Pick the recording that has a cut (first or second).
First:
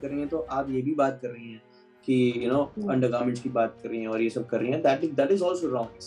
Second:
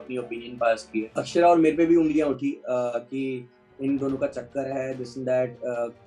second